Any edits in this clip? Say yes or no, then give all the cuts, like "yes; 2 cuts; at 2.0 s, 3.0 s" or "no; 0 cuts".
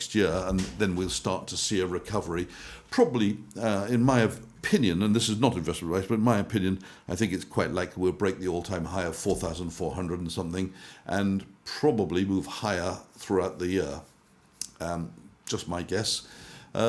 no; 0 cuts